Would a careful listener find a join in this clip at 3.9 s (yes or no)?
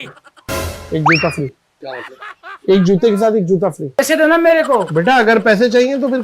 yes